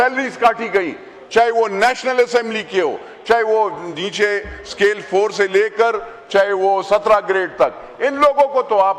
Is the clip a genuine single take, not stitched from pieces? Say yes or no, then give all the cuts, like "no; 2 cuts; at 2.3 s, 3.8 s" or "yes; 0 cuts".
yes; 0 cuts